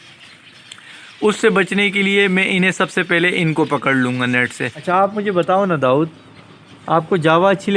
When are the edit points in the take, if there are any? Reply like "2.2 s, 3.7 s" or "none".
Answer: 4.8 s